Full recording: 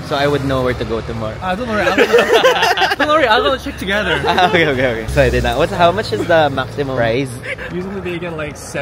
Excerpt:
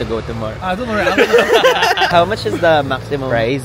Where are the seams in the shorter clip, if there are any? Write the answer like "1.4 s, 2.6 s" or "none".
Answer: 2.1 s